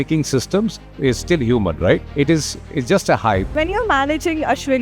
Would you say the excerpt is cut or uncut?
cut